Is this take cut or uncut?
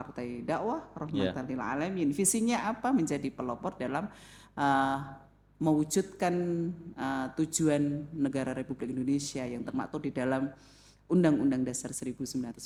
uncut